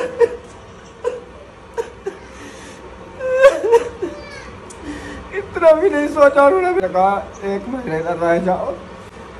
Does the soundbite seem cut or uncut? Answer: cut